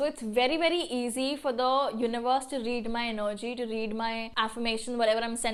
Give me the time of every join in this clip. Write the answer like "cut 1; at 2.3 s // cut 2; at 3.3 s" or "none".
none